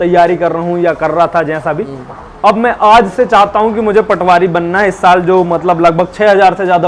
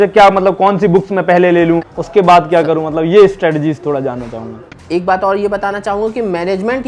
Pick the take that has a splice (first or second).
second